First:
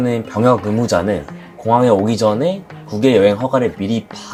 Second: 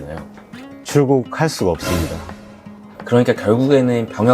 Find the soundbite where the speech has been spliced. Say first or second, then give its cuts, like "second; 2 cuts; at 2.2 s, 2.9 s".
second; 1 cut; at 2.7 s